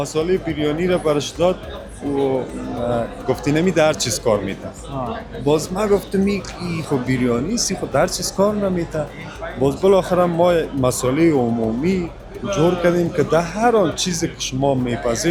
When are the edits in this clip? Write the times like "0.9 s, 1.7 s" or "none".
none